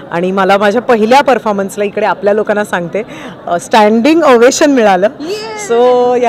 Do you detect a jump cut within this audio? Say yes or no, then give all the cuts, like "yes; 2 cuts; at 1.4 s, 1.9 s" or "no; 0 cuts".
no; 0 cuts